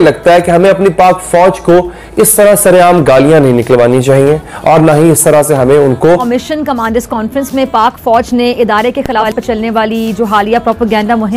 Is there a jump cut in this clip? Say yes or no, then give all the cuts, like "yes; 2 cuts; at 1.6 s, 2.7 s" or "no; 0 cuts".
yes; 2 cuts; at 6.4 s, 9.3 s